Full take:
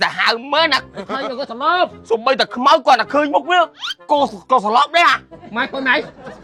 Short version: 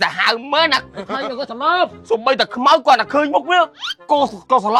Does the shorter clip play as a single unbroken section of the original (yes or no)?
yes